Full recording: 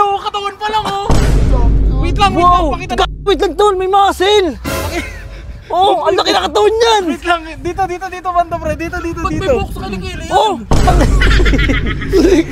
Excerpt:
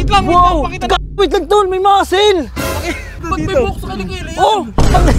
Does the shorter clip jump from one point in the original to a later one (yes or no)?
yes